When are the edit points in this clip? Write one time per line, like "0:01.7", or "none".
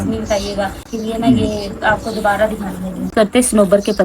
0:00.9
0:03.1